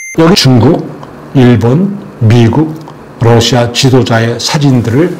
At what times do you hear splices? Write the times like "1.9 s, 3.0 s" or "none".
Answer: none